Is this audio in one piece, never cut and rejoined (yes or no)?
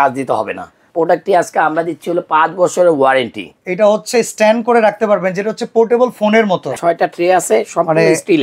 no